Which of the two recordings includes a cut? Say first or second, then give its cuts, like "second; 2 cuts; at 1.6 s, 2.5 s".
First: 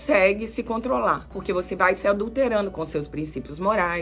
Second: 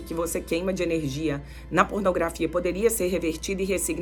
first; 1 cut; at 1.3 s